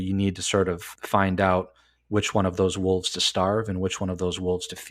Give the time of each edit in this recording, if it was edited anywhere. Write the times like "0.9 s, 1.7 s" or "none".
0.9 s